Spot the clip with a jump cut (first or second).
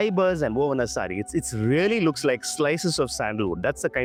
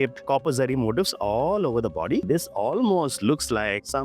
second